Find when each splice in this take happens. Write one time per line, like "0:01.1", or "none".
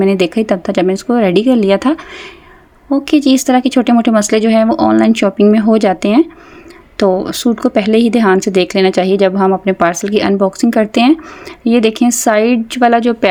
none